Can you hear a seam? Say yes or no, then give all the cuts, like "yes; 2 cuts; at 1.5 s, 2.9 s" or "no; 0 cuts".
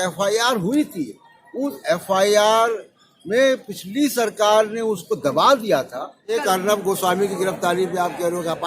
yes; 1 cut; at 6.3 s